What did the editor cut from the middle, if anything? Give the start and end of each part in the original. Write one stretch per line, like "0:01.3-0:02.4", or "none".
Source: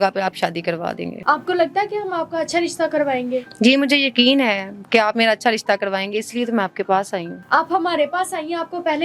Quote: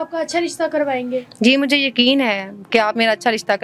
none